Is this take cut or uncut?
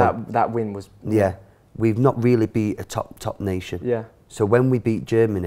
cut